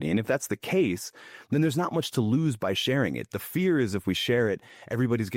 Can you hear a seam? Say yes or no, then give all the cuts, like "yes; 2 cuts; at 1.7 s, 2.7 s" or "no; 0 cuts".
no; 0 cuts